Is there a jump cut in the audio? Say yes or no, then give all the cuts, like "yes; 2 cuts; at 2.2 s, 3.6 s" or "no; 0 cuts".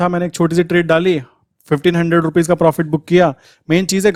no; 0 cuts